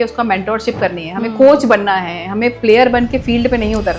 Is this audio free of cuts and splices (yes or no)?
yes